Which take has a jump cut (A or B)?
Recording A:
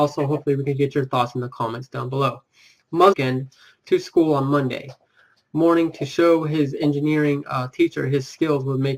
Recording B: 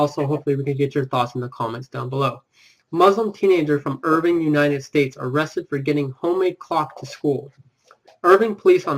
B